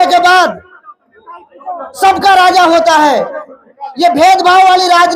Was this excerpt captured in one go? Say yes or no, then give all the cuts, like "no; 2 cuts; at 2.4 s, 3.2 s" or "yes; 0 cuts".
yes; 0 cuts